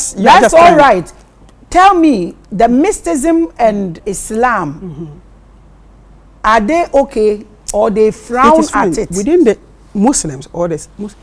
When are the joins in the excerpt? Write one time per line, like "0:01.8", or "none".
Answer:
0:04.1
0:08.6